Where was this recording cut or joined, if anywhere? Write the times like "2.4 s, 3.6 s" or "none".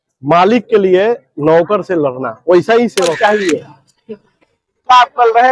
3.2 s